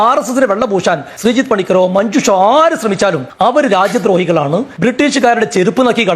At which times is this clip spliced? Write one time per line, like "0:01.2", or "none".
0:01.1
0:03.3
0:04.7